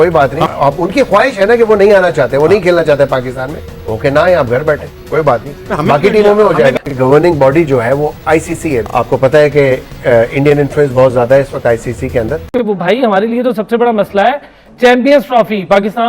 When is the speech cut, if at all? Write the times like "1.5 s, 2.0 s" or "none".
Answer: 12.5 s